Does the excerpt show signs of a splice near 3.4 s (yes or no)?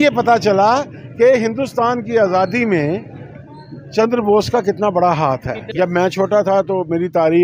no